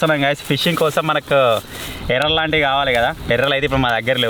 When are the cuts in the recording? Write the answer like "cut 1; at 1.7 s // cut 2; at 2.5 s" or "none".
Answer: none